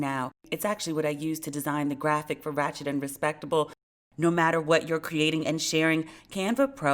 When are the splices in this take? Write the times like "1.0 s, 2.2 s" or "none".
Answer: 3.8 s